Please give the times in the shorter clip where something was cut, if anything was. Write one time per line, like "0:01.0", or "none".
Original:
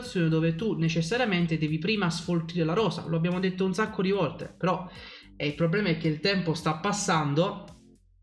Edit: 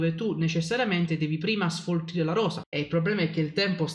0:02.6